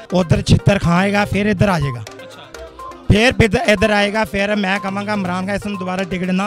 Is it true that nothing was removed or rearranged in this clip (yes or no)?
yes